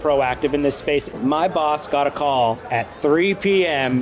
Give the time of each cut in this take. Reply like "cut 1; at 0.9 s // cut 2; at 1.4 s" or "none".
cut 1; at 1.1 s // cut 2; at 2.6 s